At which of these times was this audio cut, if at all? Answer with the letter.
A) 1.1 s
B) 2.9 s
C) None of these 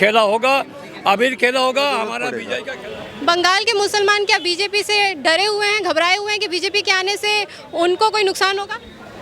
B